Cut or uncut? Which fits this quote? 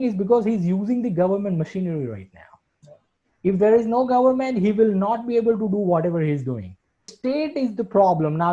cut